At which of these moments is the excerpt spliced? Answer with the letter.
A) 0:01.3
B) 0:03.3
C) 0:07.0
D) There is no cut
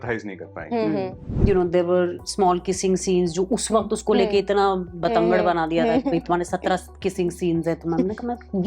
A